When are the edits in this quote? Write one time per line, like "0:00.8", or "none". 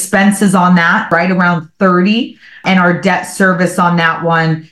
0:01.1
0:02.6